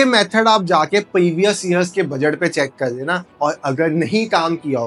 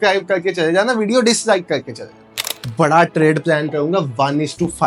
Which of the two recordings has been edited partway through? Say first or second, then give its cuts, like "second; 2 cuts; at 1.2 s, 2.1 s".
second; 1 cut; at 2.5 s